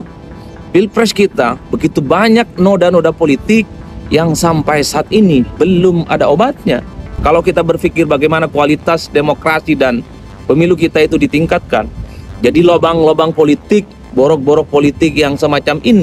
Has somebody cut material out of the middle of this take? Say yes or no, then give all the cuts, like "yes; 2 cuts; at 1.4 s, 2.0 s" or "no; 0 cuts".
yes; 1 cut; at 7.0 s